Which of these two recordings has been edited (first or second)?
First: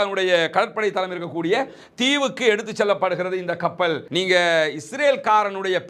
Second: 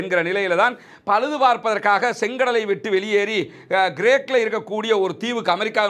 first